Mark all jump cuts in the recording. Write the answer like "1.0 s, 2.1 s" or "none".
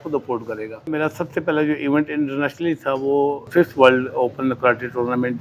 0.9 s, 3.4 s